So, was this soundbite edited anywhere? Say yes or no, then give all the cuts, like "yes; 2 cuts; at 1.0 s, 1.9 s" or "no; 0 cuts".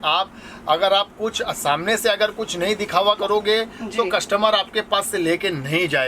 no; 0 cuts